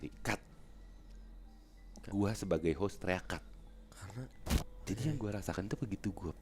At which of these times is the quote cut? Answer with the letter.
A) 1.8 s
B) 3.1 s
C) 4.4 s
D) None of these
C